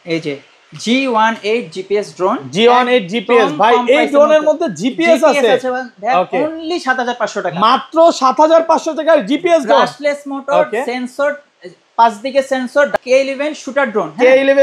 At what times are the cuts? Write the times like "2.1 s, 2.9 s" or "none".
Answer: 13.0 s